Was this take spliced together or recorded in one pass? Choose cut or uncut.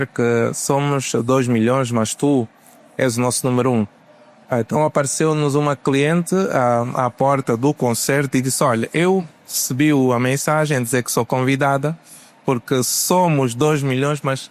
uncut